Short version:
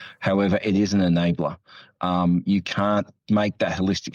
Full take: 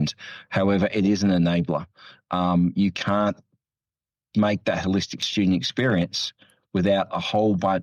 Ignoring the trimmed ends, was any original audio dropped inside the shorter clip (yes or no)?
yes